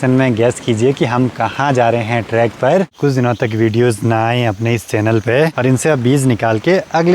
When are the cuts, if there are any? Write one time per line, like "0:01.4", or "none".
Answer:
0:03.0
0:05.5